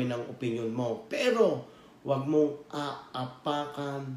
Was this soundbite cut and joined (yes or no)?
no